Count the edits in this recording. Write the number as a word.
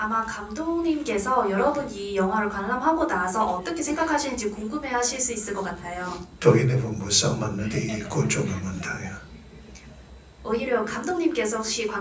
zero